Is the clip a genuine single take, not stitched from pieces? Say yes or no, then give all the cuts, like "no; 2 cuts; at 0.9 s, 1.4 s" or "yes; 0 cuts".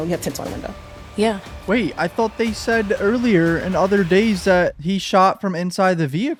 yes; 0 cuts